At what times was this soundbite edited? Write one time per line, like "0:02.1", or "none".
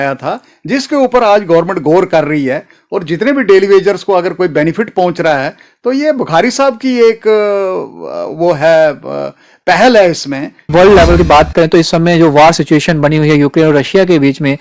0:10.6